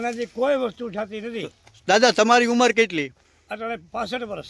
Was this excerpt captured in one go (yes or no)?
yes